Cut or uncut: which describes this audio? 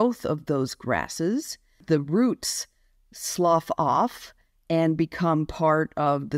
cut